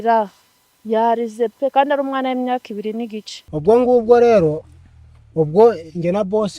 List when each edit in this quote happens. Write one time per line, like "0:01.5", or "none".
0:03.5